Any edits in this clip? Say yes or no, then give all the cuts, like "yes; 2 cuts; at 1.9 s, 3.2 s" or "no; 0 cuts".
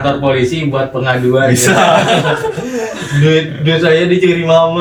no; 0 cuts